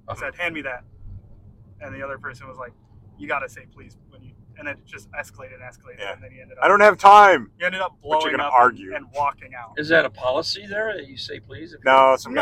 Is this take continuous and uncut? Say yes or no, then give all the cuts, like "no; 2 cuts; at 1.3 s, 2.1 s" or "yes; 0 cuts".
yes; 0 cuts